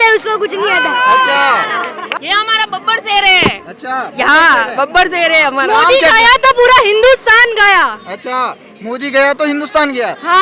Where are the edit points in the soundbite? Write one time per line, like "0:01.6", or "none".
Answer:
0:02.0

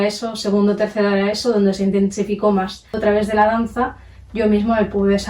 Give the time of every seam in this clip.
0:03.0

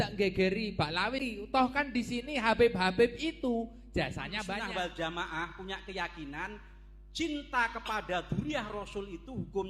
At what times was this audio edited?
0:01.2
0:04.2

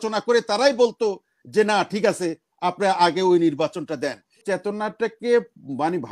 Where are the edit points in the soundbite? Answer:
0:04.4

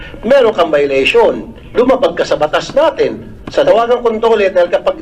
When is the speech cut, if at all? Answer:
0:03.6

